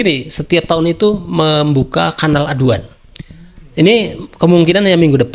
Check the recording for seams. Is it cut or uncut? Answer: uncut